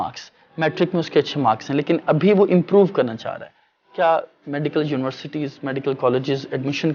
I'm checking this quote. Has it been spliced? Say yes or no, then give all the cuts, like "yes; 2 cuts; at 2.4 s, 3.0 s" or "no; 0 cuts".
no; 0 cuts